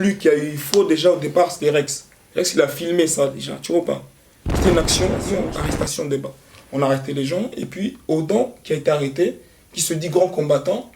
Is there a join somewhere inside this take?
yes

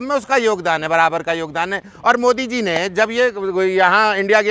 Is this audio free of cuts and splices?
yes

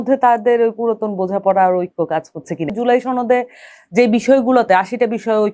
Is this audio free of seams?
no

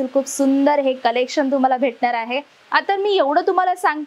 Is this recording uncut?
no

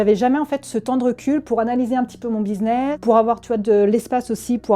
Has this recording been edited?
no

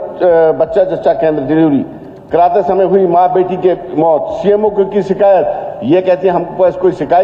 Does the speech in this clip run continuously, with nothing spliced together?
yes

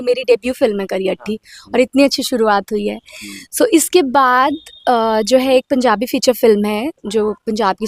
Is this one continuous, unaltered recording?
yes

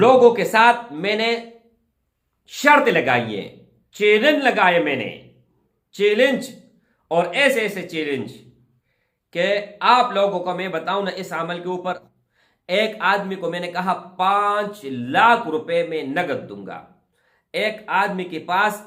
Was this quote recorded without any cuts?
no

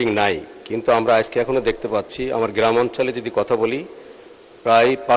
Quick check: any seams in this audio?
no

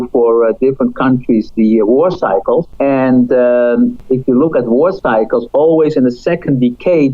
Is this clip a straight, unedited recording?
no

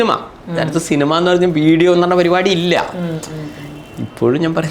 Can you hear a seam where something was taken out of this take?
no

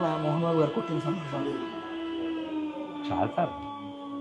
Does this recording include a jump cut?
no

